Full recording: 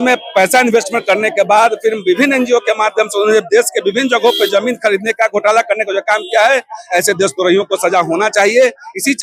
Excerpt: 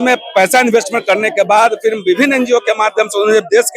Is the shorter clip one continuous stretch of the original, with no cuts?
yes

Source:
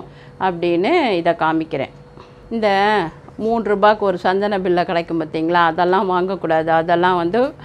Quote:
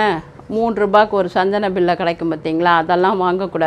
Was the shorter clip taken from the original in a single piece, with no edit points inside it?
yes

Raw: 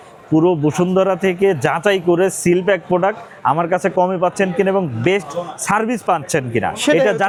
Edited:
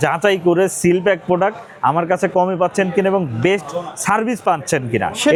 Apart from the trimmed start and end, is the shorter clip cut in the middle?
no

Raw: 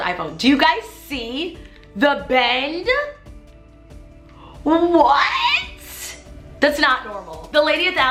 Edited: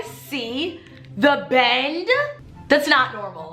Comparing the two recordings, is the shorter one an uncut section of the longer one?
no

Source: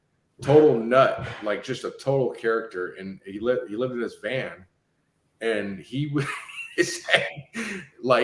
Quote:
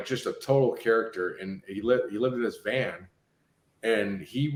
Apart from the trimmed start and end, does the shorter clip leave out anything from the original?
no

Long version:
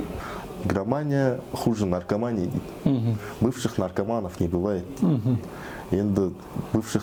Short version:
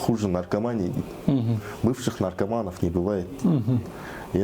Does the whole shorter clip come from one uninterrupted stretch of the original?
yes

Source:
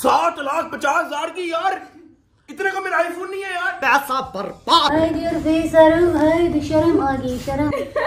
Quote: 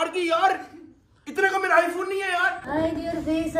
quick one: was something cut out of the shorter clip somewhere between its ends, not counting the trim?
yes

